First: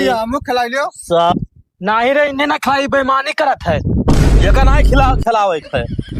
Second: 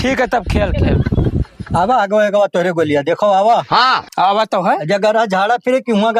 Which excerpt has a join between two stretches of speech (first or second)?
second